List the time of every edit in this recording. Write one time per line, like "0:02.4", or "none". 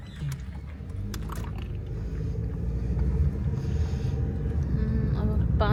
none

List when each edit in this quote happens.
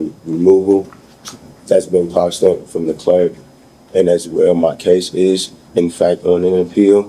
none

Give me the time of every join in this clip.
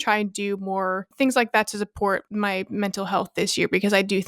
0:01.0
0:02.3

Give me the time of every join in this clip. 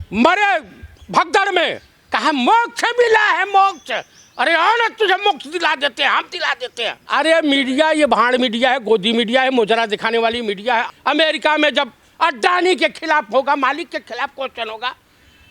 0:07.0
0:10.9

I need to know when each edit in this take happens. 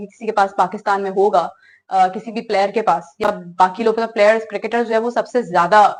none

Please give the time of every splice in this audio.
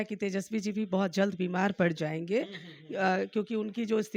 none

